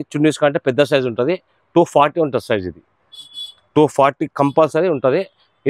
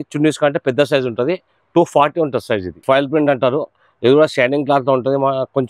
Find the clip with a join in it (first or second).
second